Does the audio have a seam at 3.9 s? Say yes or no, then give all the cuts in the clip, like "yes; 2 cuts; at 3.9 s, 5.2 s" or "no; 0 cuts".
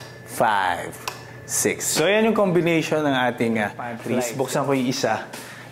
yes; 1 cut; at 3.9 s